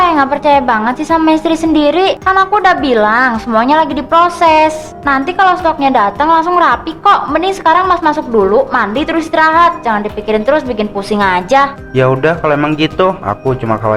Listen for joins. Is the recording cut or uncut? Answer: uncut